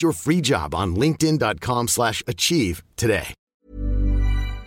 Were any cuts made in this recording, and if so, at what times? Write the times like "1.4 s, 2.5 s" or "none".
3.5 s

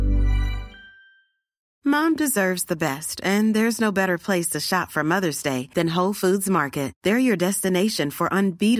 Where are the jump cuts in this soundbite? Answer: 1.7 s

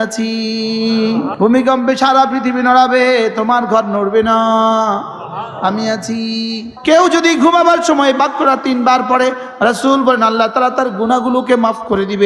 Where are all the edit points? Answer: 1.3 s, 6.7 s

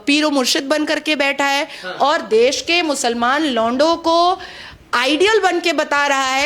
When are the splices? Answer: none

